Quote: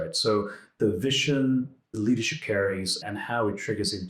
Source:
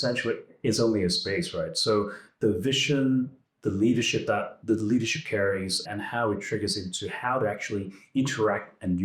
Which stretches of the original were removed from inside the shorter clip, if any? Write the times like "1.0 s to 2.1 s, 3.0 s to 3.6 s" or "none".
3.6 s to 4.8 s